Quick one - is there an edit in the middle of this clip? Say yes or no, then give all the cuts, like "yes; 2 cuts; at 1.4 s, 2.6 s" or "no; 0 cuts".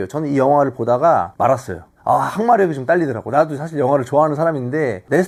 no; 0 cuts